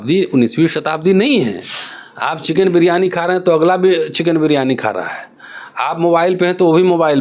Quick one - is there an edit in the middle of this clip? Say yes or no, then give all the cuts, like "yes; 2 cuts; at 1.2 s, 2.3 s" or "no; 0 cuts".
no; 0 cuts